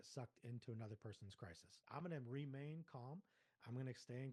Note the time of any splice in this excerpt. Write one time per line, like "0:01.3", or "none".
0:01.8